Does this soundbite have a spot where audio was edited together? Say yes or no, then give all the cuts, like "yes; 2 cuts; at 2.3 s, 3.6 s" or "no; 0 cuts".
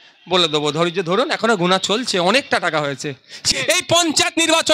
yes; 1 cut; at 3.4 s